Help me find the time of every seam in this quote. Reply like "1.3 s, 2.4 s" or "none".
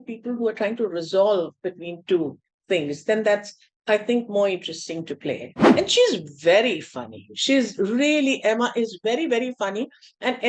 5.5 s